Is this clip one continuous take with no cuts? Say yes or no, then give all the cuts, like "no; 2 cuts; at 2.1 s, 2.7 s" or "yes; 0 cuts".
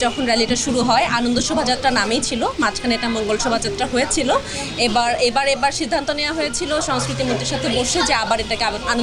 yes; 0 cuts